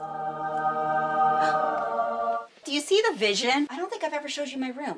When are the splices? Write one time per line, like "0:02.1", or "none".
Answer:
0:02.4
0:03.8